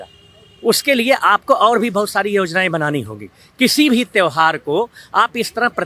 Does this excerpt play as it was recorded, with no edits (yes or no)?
yes